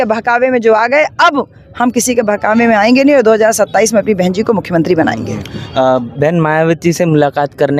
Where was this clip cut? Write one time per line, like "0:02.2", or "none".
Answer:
none